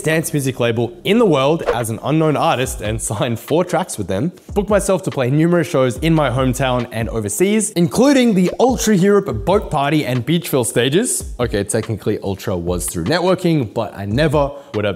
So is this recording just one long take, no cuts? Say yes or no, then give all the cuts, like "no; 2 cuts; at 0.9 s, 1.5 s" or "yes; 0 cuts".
yes; 0 cuts